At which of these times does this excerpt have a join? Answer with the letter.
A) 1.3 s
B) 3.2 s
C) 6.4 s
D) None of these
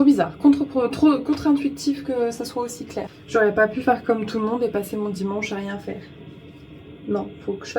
B